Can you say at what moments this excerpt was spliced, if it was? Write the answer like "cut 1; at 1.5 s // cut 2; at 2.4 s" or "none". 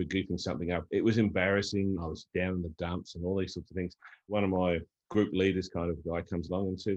cut 1; at 0.8 s // cut 2; at 2.0 s // cut 3; at 4.3 s // cut 4; at 5.0 s